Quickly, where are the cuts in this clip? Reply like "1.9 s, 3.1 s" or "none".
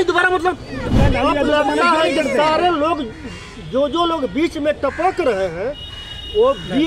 1.0 s